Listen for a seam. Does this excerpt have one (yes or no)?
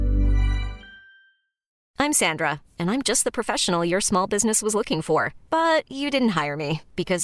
yes